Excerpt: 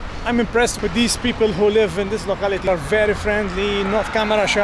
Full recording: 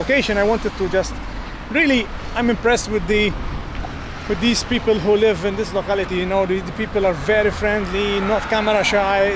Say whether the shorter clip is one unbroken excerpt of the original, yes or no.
no